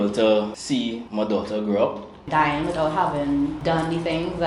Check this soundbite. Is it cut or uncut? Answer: cut